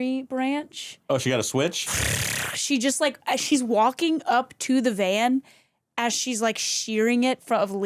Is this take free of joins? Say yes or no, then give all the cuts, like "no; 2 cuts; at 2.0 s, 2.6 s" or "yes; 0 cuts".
yes; 0 cuts